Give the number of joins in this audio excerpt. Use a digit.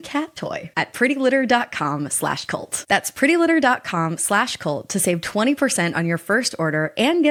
0